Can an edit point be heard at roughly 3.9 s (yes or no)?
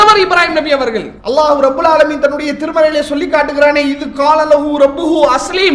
no